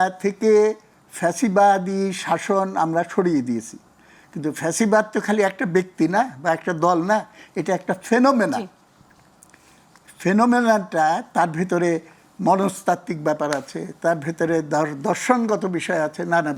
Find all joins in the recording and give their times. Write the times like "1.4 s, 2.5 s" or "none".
none